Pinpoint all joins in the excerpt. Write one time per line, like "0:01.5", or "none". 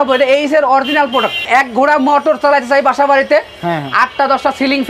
0:01.4